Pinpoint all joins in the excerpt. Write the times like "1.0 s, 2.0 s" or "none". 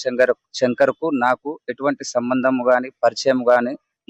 none